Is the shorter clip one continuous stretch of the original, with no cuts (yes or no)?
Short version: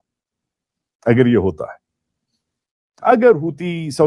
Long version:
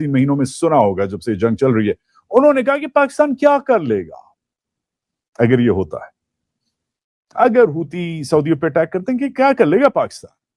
yes